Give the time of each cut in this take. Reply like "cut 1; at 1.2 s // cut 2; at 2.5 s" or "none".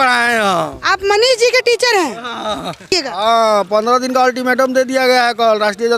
cut 1; at 2.9 s